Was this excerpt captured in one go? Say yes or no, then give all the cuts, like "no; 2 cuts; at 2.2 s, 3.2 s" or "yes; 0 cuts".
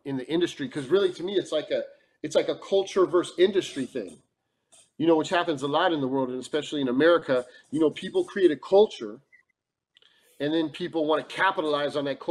yes; 0 cuts